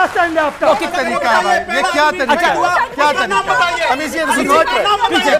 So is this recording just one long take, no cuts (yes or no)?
no